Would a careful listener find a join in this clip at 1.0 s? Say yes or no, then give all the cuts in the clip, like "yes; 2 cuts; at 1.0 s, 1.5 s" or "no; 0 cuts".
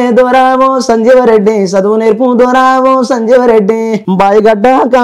no; 1 cut; at 4.0 s